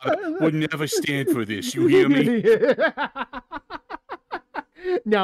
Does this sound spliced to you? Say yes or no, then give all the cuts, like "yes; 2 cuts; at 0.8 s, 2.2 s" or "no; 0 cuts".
no; 0 cuts